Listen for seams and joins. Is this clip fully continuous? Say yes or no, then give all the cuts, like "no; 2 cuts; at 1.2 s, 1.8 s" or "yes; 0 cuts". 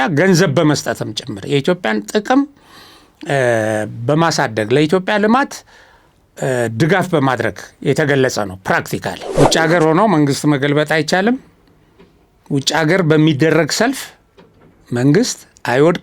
no; 1 cut; at 9.2 s